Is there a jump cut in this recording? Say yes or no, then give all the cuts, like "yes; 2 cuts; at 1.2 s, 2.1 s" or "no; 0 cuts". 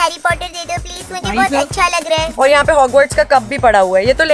no; 0 cuts